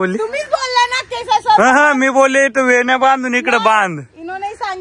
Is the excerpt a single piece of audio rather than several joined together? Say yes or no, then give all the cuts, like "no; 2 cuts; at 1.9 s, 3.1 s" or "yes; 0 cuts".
yes; 0 cuts